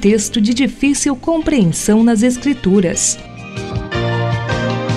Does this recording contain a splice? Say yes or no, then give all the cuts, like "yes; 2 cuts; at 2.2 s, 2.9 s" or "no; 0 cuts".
yes; 1 cut; at 3.1 s